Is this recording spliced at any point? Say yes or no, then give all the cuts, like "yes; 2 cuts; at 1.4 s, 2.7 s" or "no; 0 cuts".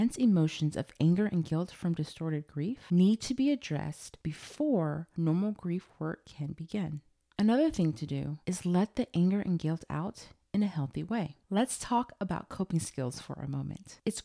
no; 0 cuts